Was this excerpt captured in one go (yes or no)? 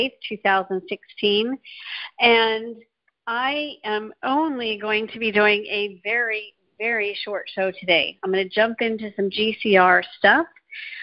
yes